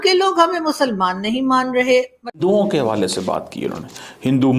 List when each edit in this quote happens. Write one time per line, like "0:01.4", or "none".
0:02.4